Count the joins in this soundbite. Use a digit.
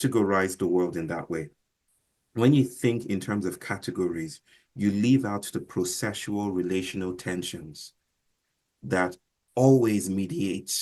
0